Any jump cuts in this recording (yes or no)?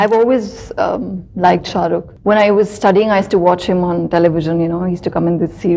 yes